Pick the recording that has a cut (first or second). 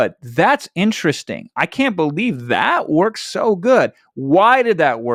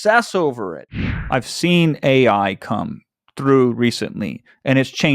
second